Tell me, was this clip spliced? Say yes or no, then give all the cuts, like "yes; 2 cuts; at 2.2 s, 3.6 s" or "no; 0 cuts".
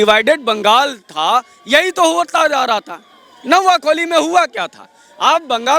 no; 0 cuts